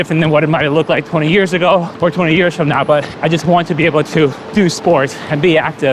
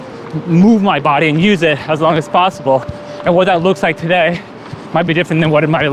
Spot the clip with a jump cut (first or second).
first